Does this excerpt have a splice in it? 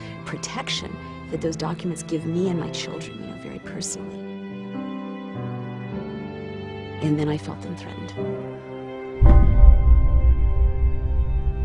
no; 0 cuts

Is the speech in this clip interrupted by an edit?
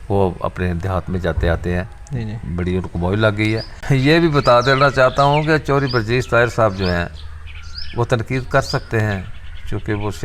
yes; 1 cut; at 3.7 s

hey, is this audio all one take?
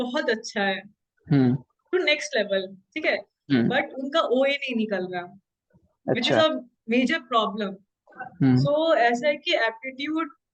yes; 0 cuts

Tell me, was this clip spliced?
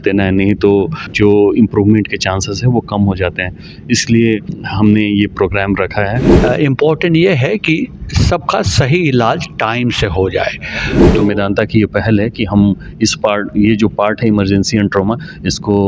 yes; 4 cuts; at 1.1 s, 4.6 s, 6.3 s, 11.0 s

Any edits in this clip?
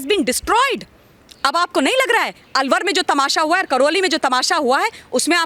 no; 0 cuts

